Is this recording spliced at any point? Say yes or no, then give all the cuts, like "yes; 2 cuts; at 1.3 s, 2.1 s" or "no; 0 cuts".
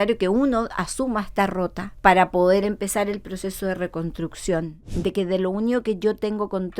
yes; 2 cuts; at 1.9 s, 4.8 s